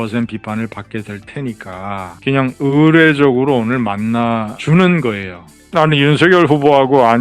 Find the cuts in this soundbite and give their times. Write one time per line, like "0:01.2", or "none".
0:05.5